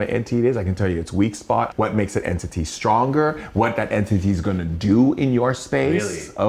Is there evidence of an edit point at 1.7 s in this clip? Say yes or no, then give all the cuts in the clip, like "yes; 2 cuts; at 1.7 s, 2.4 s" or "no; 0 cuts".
yes; 1 cut; at 1.7 s